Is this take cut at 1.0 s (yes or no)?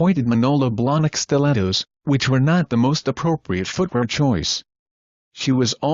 no